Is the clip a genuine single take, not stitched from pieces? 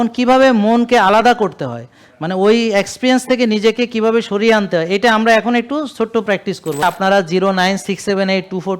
no; 1 cut; at 6.8 s

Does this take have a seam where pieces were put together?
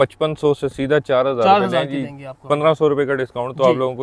no; 0 cuts

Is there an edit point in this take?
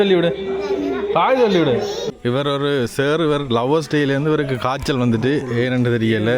yes; 1 cut; at 2.1 s

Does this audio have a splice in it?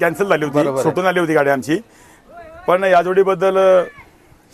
no; 0 cuts

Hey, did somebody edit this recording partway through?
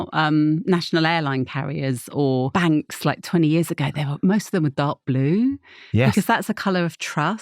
yes; 1 cut; at 2.5 s

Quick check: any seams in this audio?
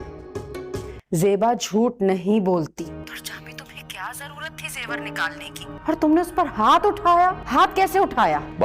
yes; 1 cut; at 0.9 s

